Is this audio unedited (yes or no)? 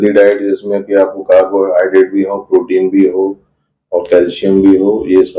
yes